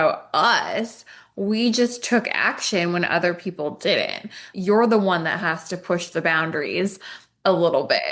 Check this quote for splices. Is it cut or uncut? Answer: cut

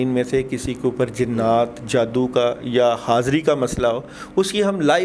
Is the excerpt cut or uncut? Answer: uncut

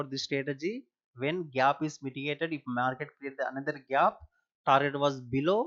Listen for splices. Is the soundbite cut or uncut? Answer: uncut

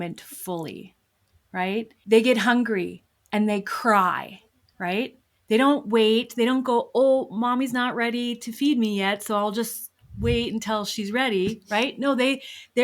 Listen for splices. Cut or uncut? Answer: cut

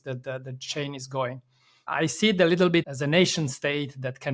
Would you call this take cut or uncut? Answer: cut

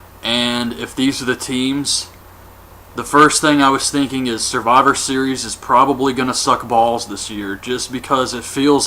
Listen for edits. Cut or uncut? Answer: cut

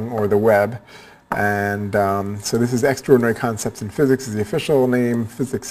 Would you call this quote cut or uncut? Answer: cut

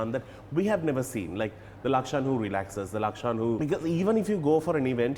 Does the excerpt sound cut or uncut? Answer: cut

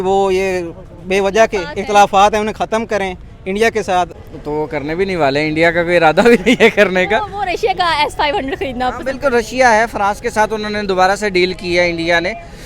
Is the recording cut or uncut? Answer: cut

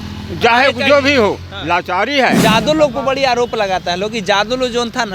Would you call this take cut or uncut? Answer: cut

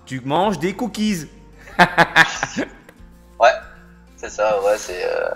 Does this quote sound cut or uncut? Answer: uncut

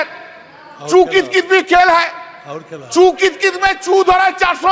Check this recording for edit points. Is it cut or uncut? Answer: uncut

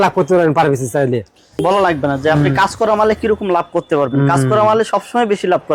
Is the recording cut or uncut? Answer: cut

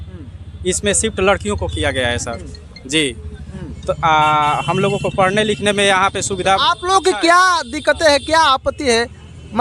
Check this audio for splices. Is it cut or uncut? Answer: uncut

